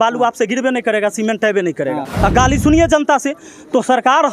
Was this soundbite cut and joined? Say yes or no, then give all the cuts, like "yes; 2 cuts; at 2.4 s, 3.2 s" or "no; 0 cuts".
yes; 1 cut; at 2.1 s